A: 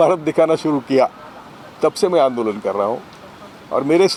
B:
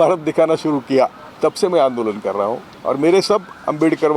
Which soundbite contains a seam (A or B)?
B